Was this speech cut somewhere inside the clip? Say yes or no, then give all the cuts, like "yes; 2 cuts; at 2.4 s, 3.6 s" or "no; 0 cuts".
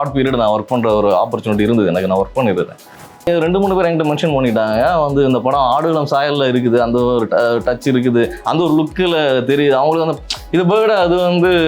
yes; 1 cut; at 3.3 s